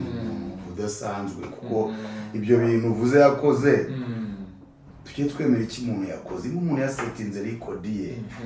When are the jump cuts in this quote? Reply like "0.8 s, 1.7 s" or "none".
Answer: none

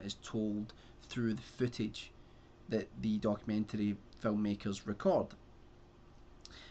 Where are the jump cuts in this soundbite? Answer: 1.3 s

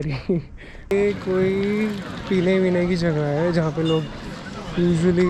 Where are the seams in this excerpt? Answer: 0.9 s

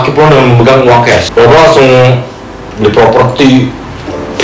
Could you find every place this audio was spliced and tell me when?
1.3 s

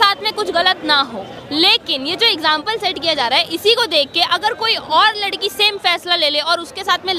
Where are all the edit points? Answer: 1.4 s

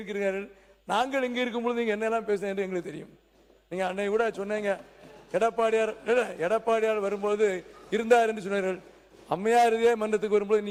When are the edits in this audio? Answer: none

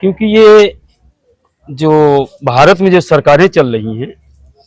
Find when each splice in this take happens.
none

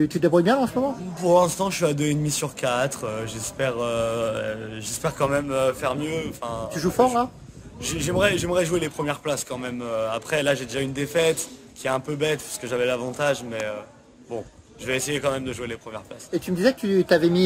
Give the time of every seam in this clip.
none

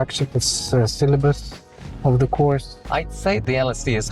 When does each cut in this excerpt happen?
2.8 s

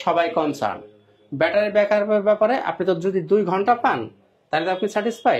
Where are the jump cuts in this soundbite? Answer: none

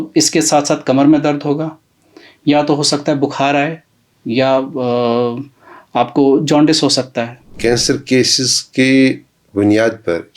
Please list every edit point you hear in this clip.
7.4 s

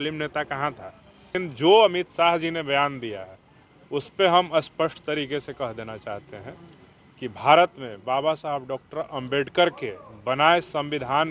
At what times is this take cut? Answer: 1.4 s

